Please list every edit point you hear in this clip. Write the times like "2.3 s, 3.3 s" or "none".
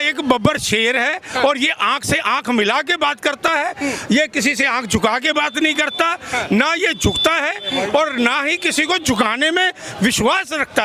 none